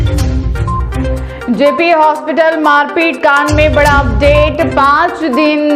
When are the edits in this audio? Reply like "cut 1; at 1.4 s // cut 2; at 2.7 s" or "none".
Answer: cut 1; at 0.9 s